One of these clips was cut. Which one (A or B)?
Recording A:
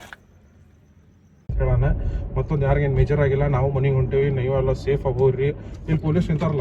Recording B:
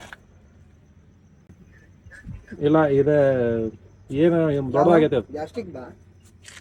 A